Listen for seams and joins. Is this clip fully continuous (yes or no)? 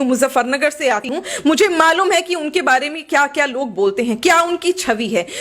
no